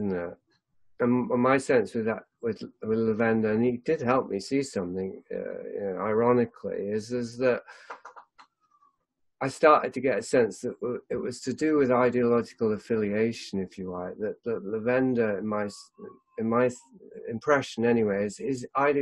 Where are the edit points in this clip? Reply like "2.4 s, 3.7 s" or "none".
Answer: none